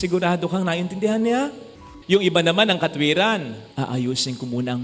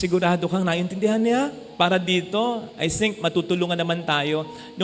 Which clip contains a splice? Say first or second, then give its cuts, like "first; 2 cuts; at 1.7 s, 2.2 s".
first; 2 cuts; at 1.6 s, 3.6 s